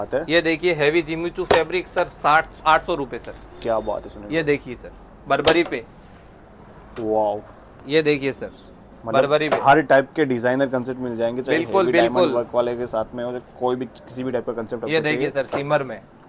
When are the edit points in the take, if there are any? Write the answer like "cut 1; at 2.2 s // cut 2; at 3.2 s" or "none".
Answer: none